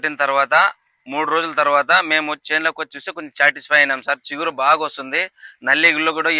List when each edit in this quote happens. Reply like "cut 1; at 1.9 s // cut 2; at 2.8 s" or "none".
none